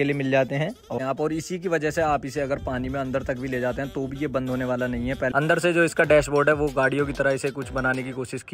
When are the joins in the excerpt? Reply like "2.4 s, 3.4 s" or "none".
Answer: 0.9 s, 5.3 s